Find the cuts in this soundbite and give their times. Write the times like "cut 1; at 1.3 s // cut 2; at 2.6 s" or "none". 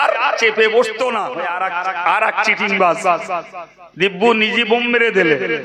cut 1; at 1.3 s